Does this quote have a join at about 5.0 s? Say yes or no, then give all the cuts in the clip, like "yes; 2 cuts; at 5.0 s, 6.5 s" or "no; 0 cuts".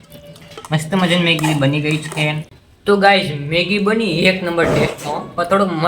no; 1 cut; at 2.5 s